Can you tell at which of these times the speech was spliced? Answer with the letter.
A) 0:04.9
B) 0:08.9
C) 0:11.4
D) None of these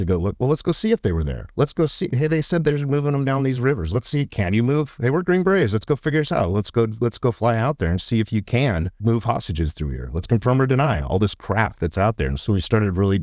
B